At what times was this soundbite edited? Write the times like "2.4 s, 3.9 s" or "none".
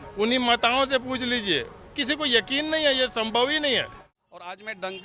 4.0 s